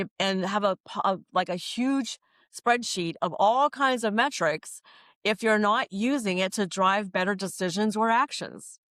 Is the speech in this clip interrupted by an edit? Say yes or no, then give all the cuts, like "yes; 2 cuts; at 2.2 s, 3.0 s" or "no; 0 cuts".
no; 0 cuts